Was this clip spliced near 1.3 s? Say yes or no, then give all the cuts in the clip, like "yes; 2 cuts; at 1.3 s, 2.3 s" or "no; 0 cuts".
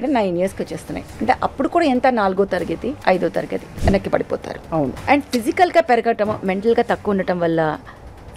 no; 3 cuts; at 3.0 s, 3.6 s, 5.0 s